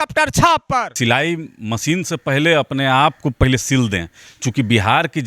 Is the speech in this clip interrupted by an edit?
yes; 1 cut; at 0.9 s

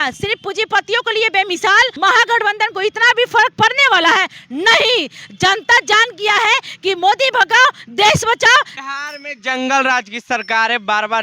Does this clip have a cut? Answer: yes; 2 cuts; at 1.9 s, 8.8 s

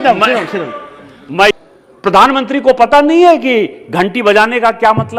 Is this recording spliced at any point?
yes; 1 cut; at 1.5 s

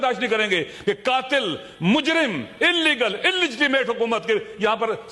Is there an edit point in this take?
no; 0 cuts

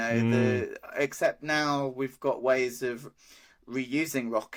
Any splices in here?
no; 0 cuts

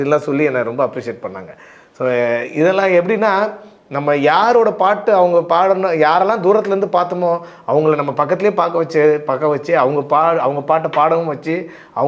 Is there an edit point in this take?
no; 0 cuts

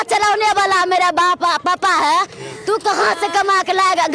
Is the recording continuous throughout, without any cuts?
yes; 0 cuts

